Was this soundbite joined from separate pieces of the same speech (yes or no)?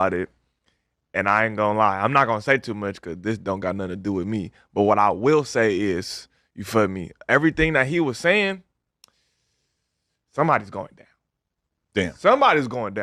no